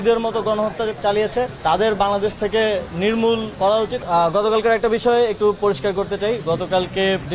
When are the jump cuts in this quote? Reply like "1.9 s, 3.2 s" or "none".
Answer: 3.9 s